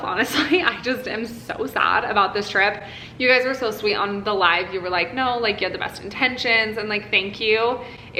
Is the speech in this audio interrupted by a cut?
no; 0 cuts

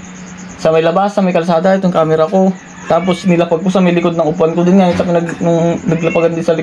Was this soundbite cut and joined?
no; 0 cuts

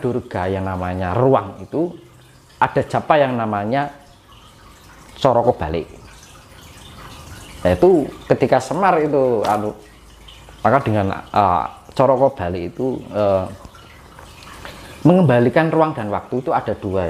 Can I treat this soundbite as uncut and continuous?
yes; 0 cuts

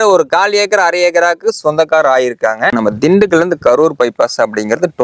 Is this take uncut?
no; 1 cut; at 2.7 s

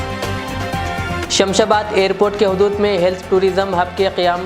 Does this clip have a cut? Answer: yes; 1 cut; at 1.2 s

